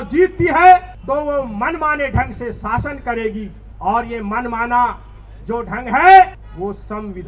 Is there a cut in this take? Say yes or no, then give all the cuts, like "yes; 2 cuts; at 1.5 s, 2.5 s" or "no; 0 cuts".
yes; 3 cuts; at 0.9 s, 3.6 s, 6.4 s